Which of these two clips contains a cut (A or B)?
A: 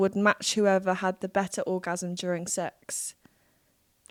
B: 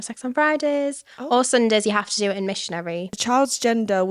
B